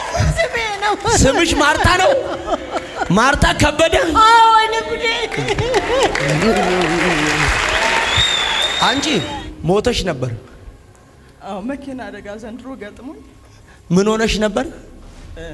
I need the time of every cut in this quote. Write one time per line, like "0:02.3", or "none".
0:08.7